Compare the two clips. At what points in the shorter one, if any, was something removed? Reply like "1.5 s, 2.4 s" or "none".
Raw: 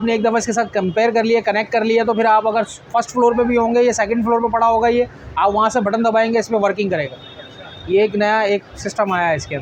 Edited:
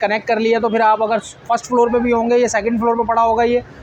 none